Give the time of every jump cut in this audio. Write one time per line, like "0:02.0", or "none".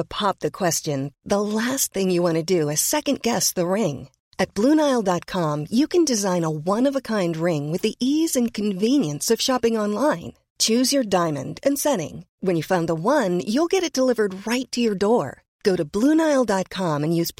none